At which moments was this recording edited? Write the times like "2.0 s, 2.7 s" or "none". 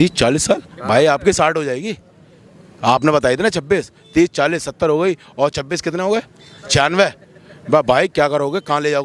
none

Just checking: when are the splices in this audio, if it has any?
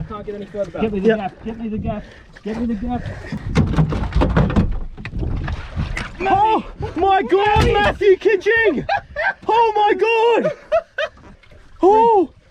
3.3 s, 11.1 s

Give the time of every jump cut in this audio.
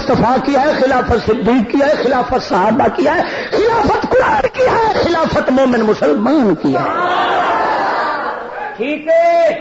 none

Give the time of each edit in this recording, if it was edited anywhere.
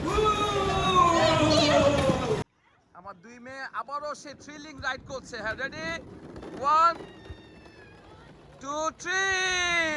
2.4 s

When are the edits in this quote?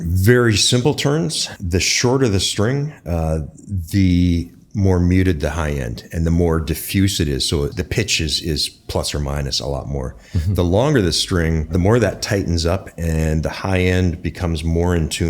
1.5 s, 7.7 s, 11.7 s

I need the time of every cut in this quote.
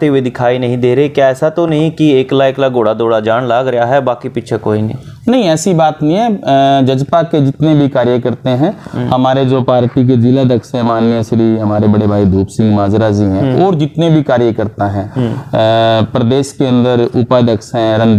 none

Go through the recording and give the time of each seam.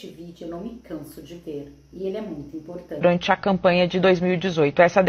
3.0 s

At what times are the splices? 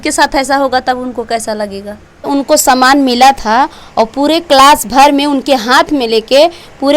2.3 s

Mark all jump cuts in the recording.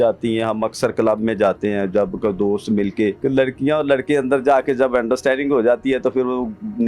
3.2 s

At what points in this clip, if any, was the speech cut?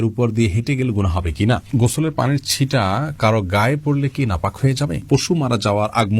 1.6 s, 5.0 s

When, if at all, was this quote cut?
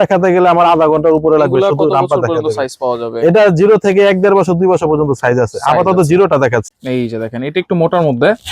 6.8 s

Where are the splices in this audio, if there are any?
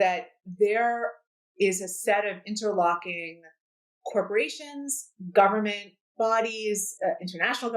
6.0 s

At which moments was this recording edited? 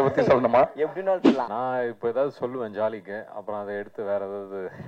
1.5 s

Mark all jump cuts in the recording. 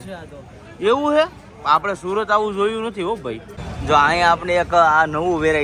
3.7 s

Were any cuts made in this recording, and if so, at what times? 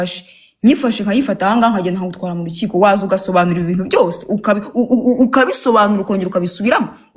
none

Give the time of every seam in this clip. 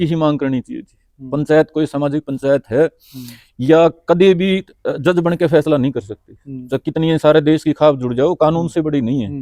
none

